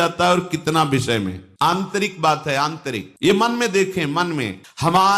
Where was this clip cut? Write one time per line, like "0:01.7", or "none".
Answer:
none